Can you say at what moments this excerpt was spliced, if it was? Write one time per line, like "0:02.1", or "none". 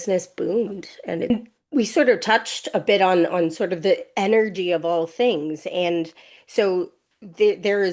0:01.3